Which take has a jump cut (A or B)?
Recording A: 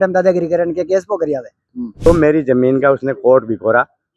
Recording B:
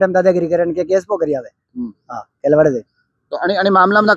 A